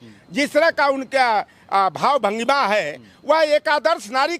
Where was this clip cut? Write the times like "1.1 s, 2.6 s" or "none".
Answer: none